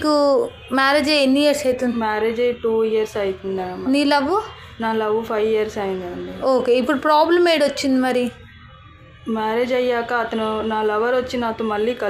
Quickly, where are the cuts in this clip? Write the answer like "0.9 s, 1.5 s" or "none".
none